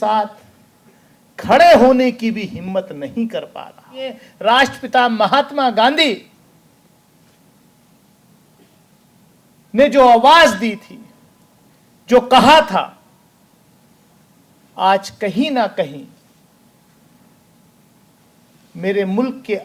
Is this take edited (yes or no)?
yes